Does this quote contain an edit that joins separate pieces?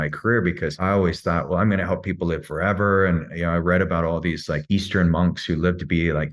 yes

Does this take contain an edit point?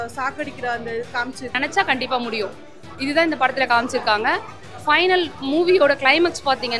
yes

